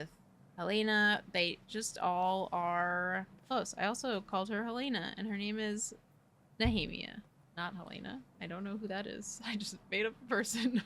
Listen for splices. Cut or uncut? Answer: cut